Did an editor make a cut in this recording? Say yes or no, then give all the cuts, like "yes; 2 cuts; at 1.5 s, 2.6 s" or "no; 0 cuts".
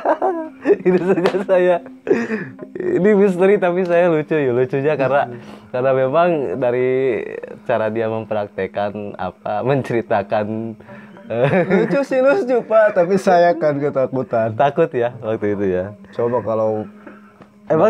no; 0 cuts